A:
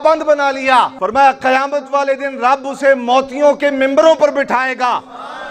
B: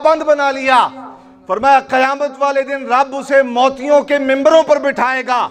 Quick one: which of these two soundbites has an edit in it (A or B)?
A